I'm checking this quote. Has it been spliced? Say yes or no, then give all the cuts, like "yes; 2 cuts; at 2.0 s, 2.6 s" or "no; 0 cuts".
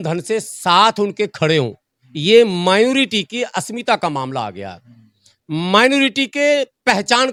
no; 0 cuts